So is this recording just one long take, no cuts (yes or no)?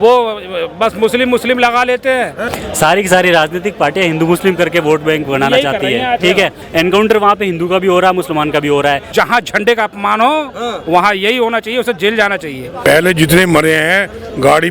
no